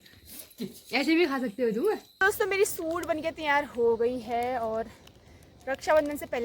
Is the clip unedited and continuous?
no; 1 cut; at 2.1 s

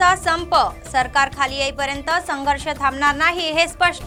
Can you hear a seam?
no; 0 cuts

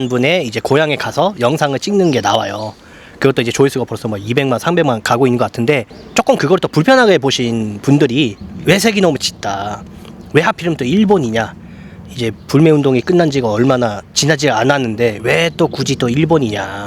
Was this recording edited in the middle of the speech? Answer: yes; 2 cuts; at 6.0 s, 8.5 s

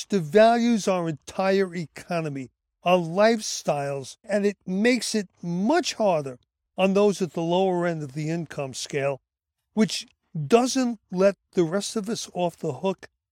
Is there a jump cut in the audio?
no; 0 cuts

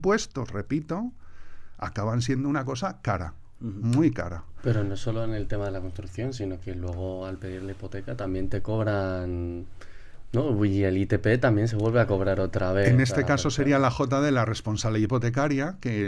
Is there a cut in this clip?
no; 0 cuts

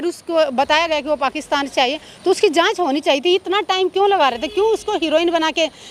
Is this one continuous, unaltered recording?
yes; 0 cuts

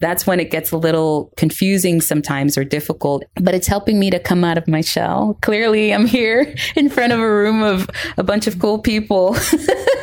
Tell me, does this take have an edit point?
yes; 2 cuts; at 1.3 s, 3.2 s

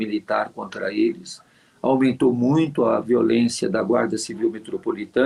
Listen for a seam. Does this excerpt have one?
no; 0 cuts

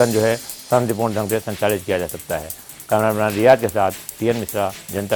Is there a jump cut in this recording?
no; 0 cuts

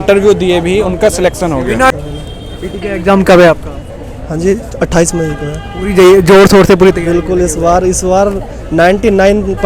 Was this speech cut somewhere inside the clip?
yes; 1 cut; at 1.9 s

